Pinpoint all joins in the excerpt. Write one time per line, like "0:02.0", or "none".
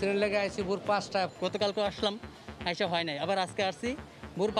0:01.3